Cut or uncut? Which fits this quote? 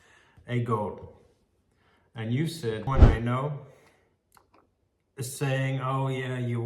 cut